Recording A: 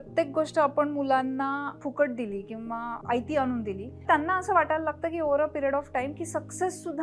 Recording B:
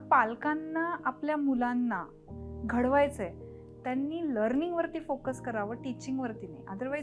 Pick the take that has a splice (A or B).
A